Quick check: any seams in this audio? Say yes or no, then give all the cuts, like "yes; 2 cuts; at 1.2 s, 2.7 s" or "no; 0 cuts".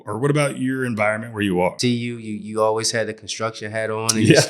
yes; 1 cut; at 1.8 s